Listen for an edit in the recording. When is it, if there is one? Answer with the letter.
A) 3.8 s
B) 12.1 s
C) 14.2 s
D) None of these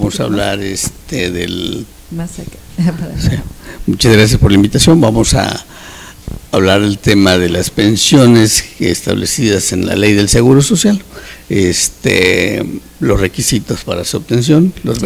B